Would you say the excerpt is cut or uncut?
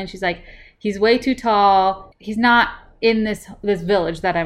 cut